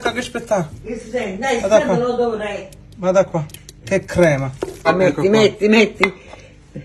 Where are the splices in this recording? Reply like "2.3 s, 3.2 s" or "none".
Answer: 4.9 s